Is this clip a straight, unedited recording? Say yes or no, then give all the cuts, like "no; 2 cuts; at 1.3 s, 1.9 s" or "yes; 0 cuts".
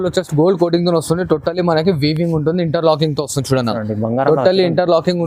yes; 0 cuts